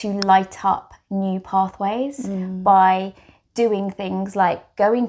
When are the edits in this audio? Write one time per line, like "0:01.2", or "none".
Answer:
none